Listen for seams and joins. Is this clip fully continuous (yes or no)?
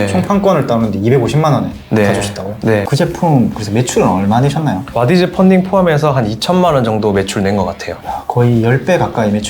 no